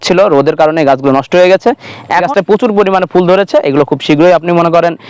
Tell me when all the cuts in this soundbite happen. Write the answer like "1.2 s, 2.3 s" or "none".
2.3 s